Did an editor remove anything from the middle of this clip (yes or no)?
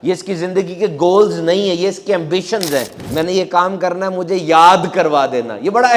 yes